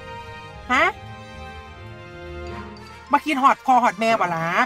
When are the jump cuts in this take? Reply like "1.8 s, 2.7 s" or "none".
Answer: 1.3 s, 3.1 s